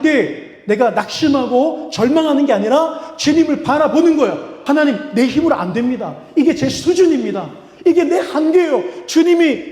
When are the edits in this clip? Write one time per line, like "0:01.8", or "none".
0:04.5